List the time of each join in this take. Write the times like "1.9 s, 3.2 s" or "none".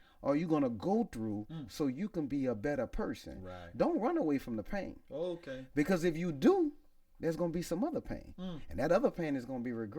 none